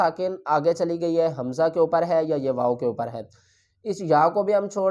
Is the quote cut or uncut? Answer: uncut